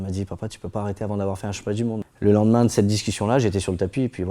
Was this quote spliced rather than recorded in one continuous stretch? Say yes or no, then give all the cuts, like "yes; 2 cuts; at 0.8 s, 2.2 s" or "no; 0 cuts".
yes; 1 cut; at 2.1 s